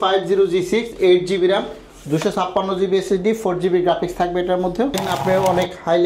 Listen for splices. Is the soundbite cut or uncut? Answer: cut